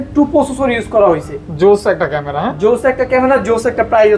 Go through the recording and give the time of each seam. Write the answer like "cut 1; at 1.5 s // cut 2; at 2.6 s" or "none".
none